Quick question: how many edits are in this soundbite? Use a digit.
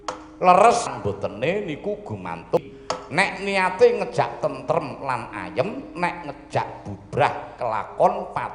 2